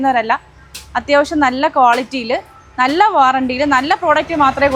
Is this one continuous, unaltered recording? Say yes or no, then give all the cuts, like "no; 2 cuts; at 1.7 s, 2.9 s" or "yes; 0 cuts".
yes; 0 cuts